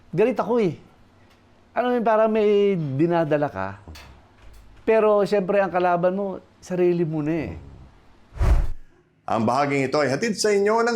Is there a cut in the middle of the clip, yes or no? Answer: yes